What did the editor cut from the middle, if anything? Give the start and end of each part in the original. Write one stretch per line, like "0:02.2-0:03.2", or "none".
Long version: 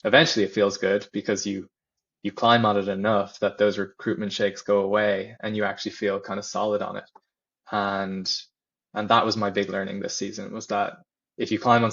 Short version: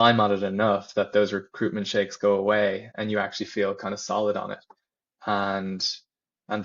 none